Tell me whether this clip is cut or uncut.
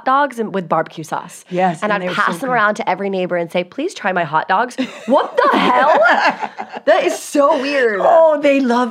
uncut